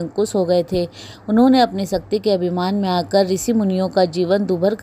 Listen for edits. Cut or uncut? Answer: uncut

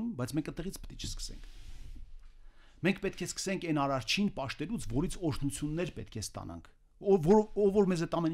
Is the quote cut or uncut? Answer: uncut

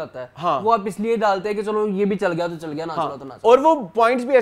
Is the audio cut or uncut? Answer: uncut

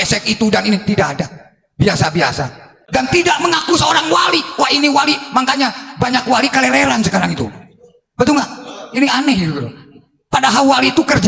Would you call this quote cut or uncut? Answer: uncut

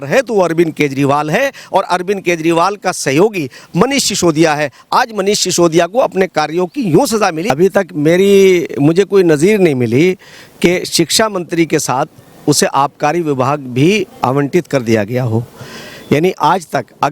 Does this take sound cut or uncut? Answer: cut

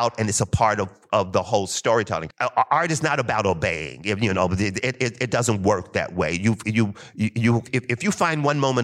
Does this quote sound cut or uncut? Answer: cut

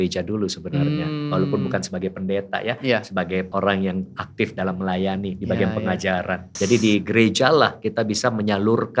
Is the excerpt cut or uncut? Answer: cut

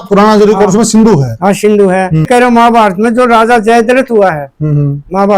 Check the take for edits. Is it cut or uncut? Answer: cut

